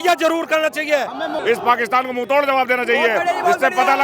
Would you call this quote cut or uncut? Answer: cut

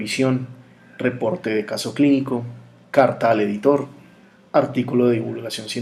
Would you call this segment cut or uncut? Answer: uncut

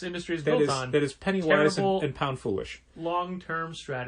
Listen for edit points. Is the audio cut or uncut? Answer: uncut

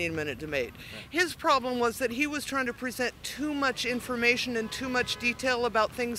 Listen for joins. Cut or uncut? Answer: uncut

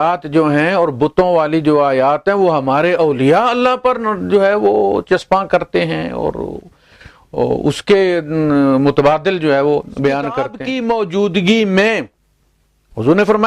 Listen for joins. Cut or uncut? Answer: cut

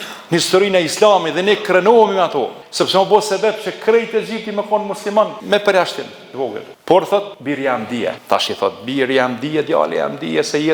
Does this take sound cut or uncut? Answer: cut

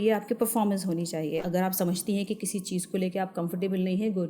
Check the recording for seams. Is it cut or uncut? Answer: cut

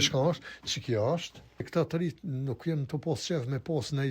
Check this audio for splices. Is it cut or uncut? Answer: cut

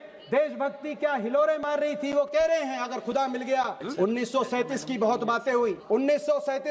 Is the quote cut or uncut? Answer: cut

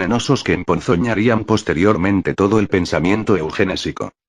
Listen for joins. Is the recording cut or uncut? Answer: uncut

